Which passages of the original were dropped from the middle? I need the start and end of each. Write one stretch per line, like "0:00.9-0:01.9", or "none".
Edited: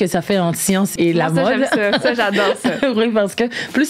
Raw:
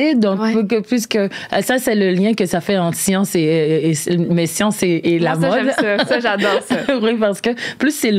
0:03.3-0:05.0